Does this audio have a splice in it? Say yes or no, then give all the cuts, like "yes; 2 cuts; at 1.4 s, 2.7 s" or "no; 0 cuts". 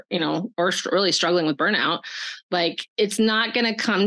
no; 0 cuts